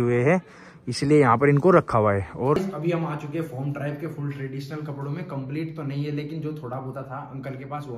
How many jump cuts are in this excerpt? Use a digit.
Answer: 1